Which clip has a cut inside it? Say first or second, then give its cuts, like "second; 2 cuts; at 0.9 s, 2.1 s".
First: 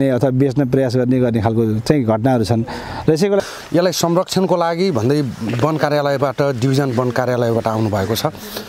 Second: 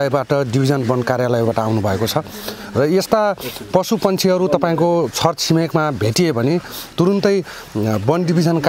first; 1 cut; at 3.4 s